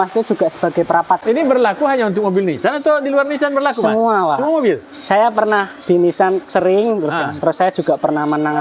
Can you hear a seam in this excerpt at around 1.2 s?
yes; 1 cut; at 1.2 s

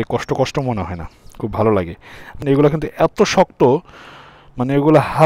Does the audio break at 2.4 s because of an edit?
yes; 1 cut; at 2.4 s

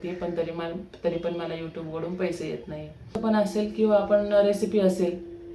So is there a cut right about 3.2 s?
yes; 1 cut; at 3.2 s

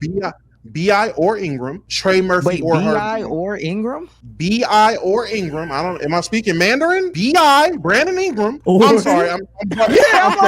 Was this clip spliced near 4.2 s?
no; 3 cuts; at 1.8 s, 7.1 s, 8.6 s

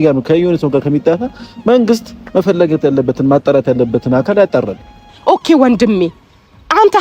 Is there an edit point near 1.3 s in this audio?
no; 1 cut; at 5.1 s

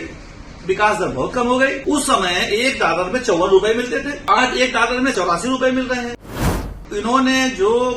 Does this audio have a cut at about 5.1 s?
yes; 4 cuts; at 1.8 s, 4.2 s, 5.1 s, 6.7 s

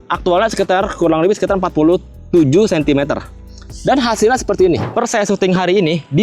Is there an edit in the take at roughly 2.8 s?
no; 1 cut; at 4.9 s

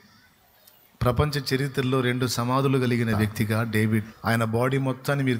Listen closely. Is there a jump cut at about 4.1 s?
yes; 1 cut; at 4.1 s

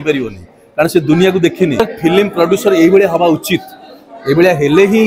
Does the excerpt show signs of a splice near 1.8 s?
yes; 1 cut; at 1.8 s

